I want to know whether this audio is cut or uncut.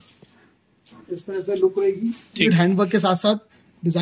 cut